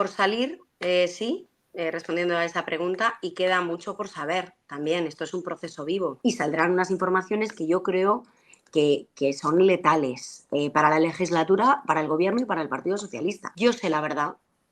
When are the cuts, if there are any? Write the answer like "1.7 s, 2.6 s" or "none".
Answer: 6.2 s, 13.5 s